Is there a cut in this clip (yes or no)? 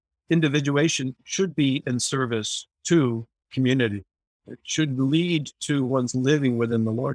yes